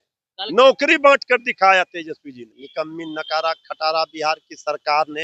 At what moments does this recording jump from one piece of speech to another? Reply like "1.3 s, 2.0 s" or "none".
2.6 s